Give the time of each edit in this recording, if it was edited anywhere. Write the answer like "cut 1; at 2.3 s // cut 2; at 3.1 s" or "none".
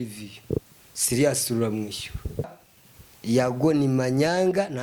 cut 1; at 2.5 s